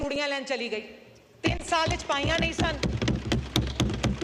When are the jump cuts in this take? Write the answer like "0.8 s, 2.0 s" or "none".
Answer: none